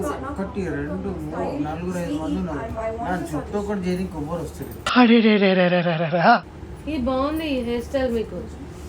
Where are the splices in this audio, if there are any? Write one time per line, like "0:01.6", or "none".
0:06.5